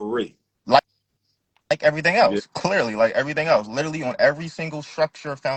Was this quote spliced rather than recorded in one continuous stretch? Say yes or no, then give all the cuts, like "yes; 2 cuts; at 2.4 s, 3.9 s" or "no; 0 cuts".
no; 0 cuts